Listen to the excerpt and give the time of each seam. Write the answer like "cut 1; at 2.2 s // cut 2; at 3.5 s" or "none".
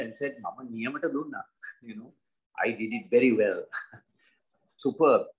none